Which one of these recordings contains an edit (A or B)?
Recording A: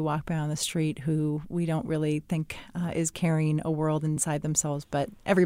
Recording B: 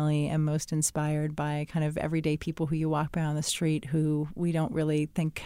A